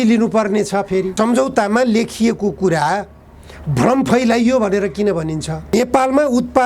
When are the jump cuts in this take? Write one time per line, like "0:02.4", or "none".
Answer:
0:01.1
0:05.7